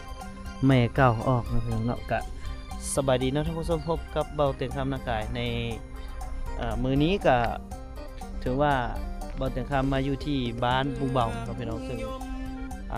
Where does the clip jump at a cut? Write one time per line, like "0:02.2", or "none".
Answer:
none